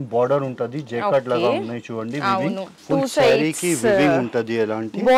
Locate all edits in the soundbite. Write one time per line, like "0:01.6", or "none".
0:02.7